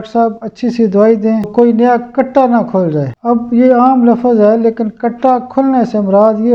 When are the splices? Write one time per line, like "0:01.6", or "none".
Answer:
0:01.5
0:03.1